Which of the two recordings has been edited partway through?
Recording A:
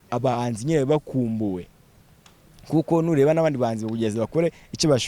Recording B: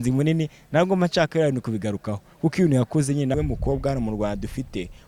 B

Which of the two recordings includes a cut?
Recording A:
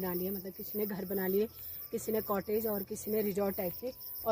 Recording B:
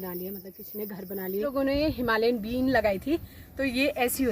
B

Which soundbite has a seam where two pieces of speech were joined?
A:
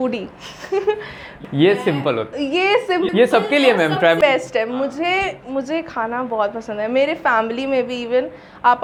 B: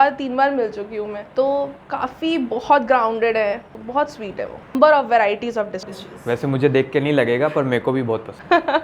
B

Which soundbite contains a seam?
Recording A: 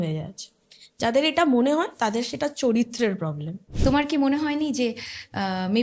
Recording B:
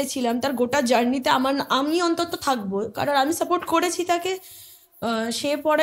A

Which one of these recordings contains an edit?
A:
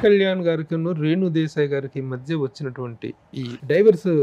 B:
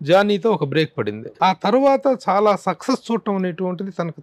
B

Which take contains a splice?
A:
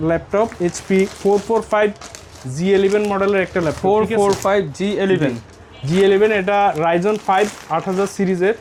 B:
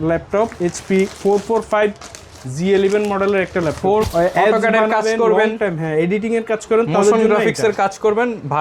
B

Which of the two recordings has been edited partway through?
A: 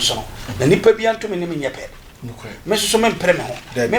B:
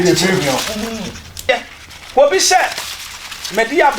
B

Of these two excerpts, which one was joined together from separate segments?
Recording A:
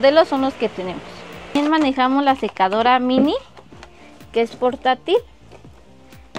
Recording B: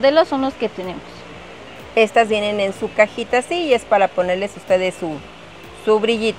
A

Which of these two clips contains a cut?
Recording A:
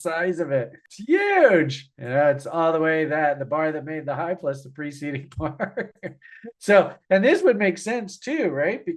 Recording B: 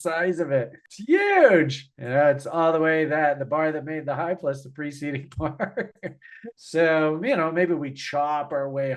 B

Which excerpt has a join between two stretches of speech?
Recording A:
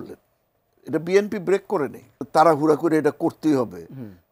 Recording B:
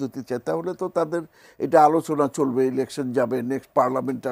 A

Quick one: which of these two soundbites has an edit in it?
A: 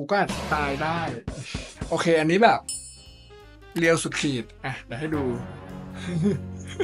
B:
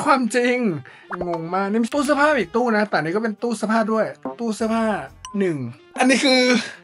B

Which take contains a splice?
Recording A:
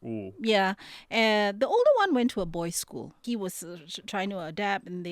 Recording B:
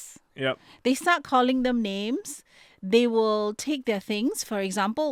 A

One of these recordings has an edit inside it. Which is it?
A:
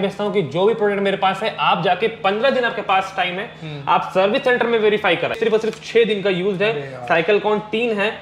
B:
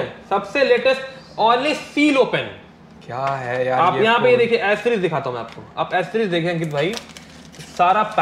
A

